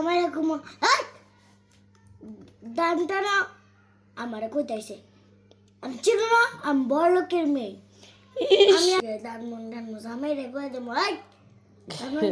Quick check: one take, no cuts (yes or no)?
no